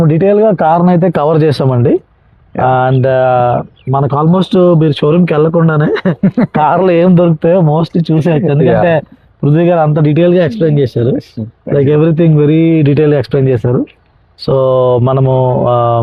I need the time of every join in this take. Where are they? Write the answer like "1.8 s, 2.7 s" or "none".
none